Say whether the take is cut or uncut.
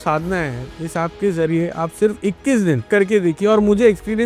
cut